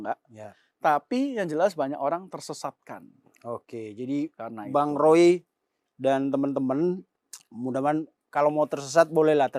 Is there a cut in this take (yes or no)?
no